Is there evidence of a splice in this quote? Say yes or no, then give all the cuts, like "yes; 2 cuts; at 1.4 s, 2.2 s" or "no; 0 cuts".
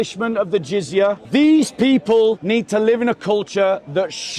yes; 2 cuts; at 1.2 s, 2.4 s